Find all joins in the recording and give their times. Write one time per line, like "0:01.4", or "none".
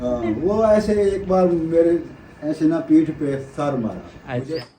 none